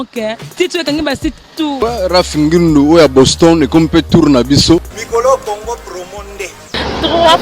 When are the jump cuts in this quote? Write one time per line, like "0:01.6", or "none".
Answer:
0:01.8
0:05.0